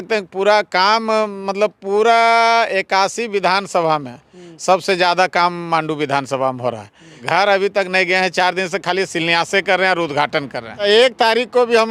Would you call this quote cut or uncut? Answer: cut